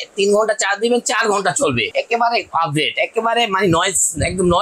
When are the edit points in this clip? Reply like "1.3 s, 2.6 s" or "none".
1.9 s